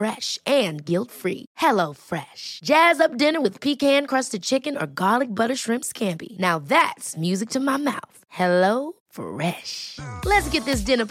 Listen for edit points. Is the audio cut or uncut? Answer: uncut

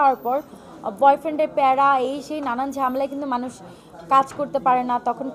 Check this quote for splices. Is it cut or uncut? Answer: uncut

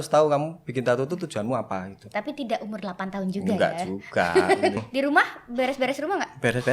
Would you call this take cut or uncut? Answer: cut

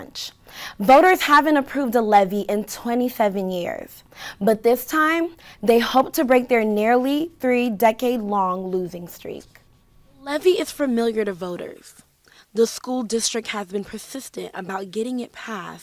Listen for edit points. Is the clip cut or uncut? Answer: uncut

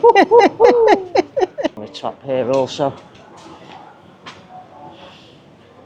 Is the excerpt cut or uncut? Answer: cut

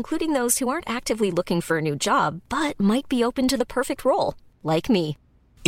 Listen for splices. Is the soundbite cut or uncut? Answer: uncut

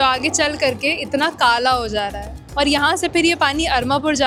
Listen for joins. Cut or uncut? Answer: uncut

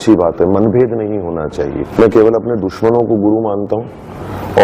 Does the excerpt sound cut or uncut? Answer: cut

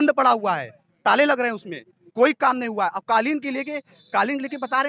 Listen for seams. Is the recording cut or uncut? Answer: uncut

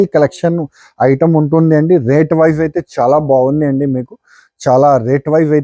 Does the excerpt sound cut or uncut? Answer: uncut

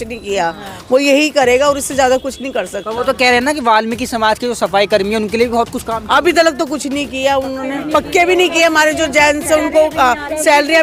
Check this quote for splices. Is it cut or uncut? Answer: uncut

